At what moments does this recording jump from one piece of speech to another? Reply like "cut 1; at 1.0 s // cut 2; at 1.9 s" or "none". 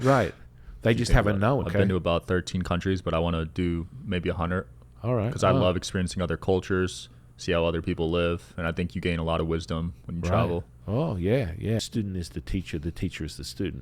cut 1; at 1.7 s // cut 2; at 11.9 s